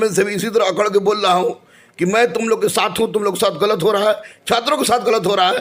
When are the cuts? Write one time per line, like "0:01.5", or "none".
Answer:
none